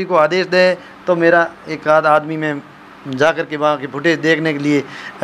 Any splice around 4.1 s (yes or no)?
no